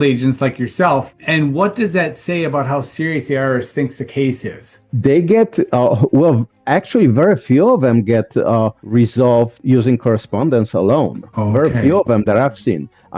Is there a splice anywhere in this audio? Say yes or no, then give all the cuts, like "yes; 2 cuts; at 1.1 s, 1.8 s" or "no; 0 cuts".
no; 0 cuts